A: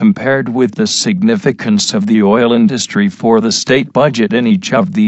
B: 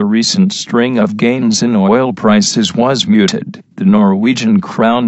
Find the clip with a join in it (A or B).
B